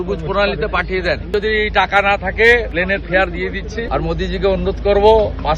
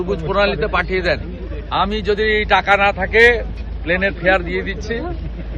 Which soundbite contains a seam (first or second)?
first